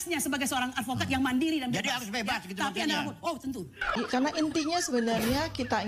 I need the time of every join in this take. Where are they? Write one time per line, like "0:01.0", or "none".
0:03.8